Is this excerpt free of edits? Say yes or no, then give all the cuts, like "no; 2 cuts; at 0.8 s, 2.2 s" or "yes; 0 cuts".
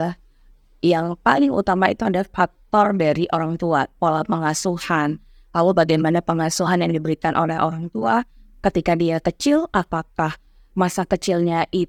yes; 0 cuts